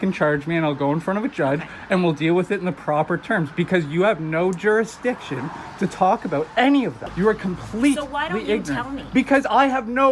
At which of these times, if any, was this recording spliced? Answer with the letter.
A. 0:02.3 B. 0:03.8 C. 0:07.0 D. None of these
C